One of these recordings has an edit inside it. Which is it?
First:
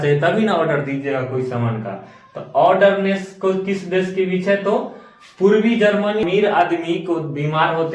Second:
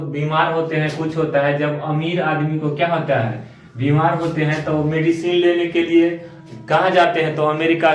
first; 1 cut; at 6.2 s

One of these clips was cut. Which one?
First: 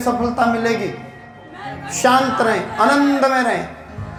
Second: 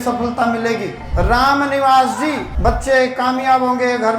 second; 2 cuts; at 1.0 s, 2.5 s

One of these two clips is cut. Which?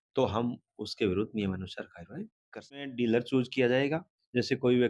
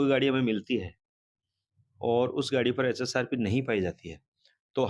first; 1 cut; at 2.9 s

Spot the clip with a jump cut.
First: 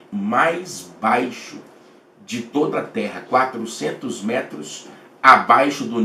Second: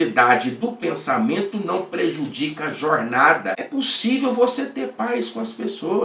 second; 1 cut; at 3.6 s

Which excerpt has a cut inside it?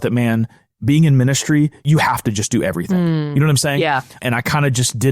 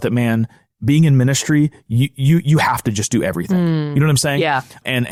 first; 2 cuts; at 1.8 s, 4.2 s

